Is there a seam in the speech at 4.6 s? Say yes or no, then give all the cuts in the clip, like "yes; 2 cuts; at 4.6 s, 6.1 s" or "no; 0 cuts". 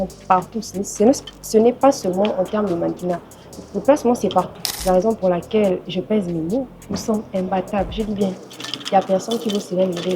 yes; 1 cut; at 4.6 s